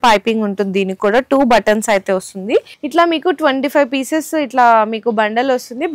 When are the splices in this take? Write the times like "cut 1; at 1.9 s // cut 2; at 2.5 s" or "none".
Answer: cut 1; at 2.8 s